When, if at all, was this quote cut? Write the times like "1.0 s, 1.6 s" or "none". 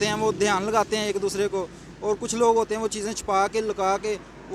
none